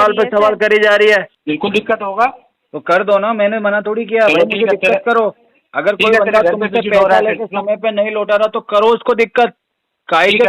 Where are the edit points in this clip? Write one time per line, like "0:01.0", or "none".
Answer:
0:01.3